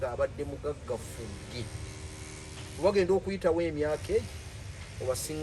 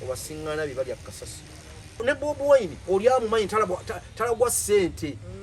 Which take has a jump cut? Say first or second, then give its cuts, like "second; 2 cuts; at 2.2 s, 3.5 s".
second; 1 cut; at 2.0 s